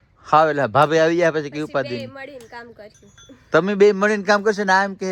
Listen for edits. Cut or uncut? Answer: uncut